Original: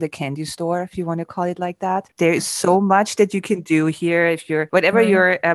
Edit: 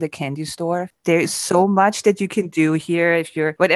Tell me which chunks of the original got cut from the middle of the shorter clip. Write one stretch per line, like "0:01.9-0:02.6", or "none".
0:01.0-0:02.1